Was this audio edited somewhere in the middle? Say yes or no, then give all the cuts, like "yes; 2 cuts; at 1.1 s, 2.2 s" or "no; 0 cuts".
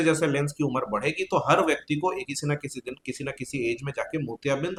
no; 0 cuts